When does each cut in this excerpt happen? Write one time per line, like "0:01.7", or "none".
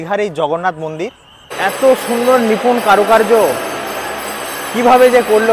0:01.4